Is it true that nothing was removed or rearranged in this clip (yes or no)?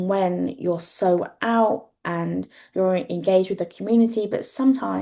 yes